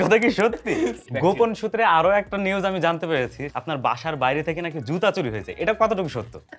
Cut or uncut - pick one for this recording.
cut